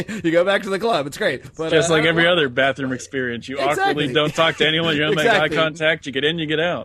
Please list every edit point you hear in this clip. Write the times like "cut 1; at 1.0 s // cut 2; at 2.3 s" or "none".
cut 1; at 1.5 s